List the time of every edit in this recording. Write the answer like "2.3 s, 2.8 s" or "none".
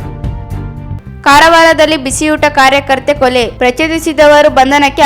0.9 s